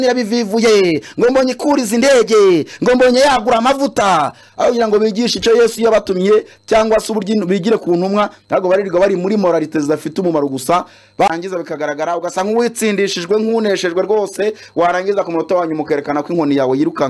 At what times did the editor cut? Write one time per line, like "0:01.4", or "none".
0:11.3

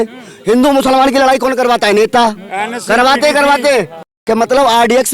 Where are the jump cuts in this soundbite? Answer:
0:04.1

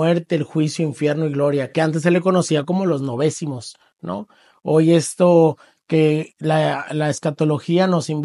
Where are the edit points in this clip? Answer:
none

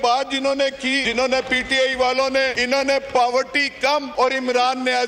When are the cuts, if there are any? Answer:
0:01.0
0:02.6
0:04.1

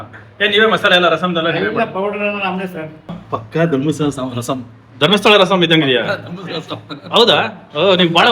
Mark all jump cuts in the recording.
0:03.2

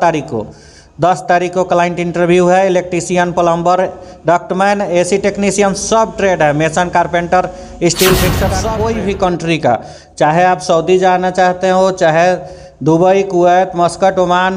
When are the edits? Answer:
0:08.6

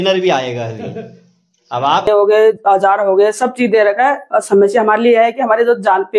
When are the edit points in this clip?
0:02.1

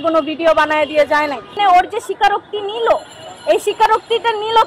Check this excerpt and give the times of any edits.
0:01.5

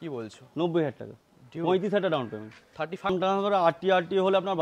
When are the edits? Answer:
0:03.1

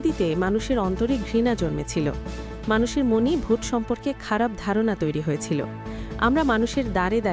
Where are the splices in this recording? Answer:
none

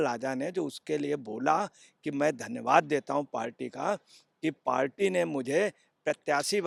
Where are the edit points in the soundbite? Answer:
none

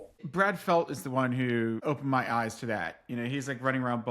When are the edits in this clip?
0:01.8

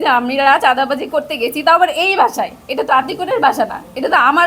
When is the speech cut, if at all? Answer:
none

